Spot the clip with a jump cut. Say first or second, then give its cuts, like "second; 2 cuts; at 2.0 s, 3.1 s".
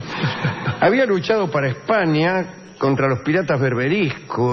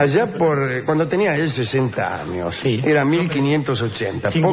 second; 1 cut; at 1.8 s